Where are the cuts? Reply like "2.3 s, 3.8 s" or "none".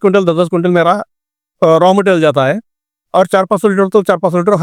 none